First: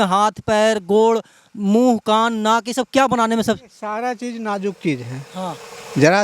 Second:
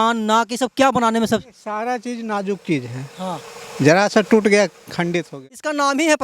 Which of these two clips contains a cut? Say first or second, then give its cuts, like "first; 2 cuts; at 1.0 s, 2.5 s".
second; 1 cut; at 5.3 s